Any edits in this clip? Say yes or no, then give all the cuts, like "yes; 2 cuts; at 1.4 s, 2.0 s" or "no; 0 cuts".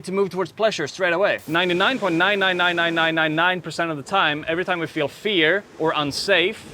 yes; 1 cut; at 1.4 s